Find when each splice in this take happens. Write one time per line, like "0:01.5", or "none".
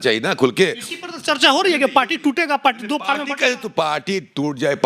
none